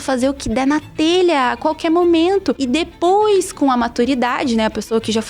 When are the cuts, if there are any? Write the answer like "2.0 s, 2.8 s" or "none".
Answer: 2.6 s

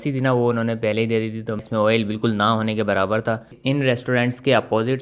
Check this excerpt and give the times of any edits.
1.7 s, 3.5 s

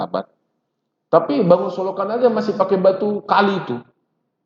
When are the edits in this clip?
none

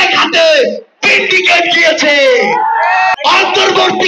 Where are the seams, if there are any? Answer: 3.1 s

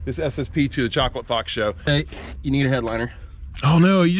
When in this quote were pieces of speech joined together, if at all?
1.9 s

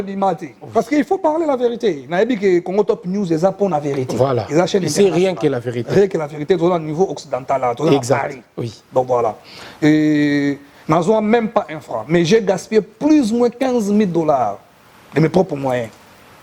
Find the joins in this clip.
none

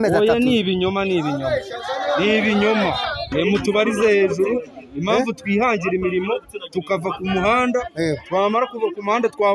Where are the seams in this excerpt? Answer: 3.2 s

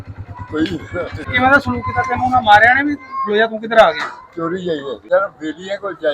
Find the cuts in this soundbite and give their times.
1.3 s, 4.9 s

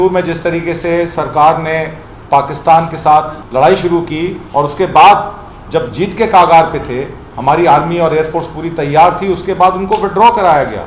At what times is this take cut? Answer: 3.4 s

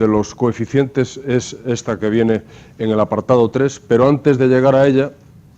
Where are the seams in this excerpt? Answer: 1.8 s

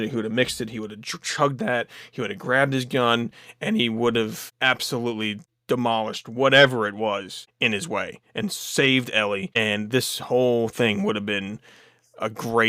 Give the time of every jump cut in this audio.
4.4 s, 5.5 s, 7.4 s, 9.5 s

